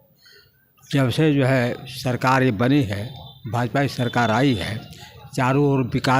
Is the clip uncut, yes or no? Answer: yes